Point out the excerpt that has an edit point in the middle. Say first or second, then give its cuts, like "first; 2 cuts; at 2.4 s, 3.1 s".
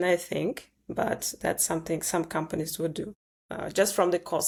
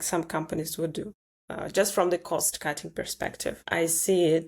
second; 1 cut; at 3.5 s